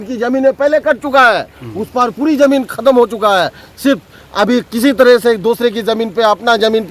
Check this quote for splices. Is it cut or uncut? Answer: uncut